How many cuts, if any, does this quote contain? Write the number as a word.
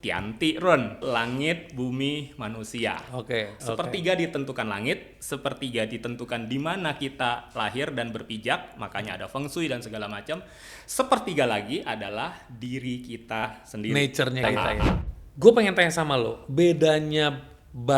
three